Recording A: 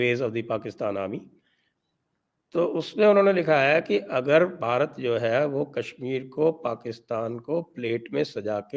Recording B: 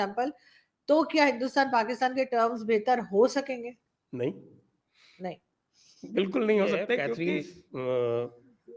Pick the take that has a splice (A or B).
B